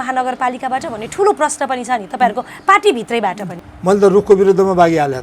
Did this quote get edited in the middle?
yes; 1 cut; at 3.5 s

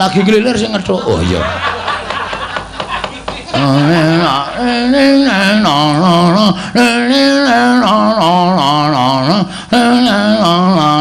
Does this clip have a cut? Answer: no; 0 cuts

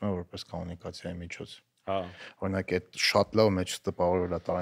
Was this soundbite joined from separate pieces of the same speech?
no; 0 cuts

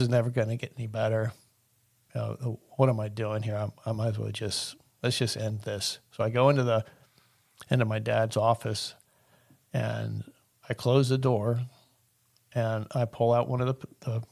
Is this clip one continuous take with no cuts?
yes; 0 cuts

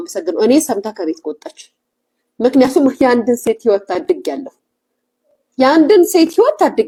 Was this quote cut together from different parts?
no; 0 cuts

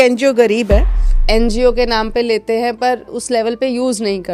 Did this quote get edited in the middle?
yes; 2 cuts; at 1.1 s, 3.1 s

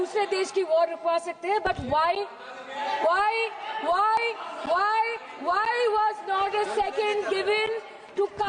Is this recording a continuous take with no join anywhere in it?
yes; 0 cuts

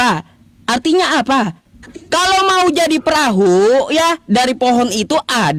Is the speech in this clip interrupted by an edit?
no; 0 cuts

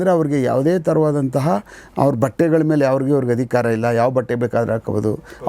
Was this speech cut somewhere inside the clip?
no; 0 cuts

